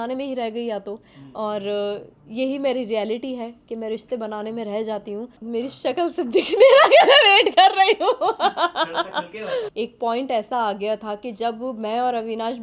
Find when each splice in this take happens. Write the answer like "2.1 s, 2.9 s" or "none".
5.3 s, 9.7 s